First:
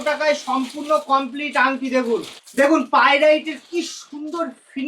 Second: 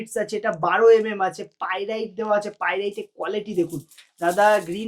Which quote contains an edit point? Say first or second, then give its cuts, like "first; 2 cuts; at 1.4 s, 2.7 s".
first; 1 cut; at 2.4 s